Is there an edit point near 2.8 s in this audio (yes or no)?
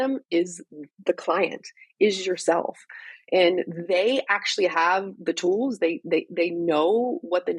no